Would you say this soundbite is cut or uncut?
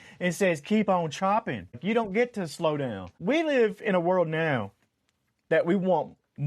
cut